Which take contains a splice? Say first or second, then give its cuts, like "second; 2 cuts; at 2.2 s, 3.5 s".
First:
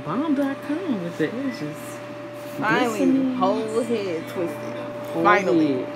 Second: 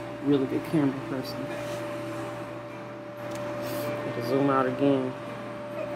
first; 1 cut; at 2.4 s